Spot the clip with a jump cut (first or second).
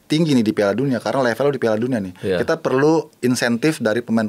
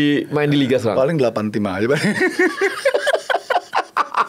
first